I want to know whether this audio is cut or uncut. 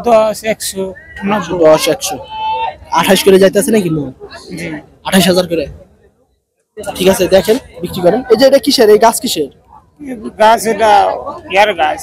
uncut